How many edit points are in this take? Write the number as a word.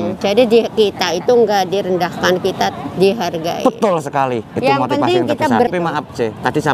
one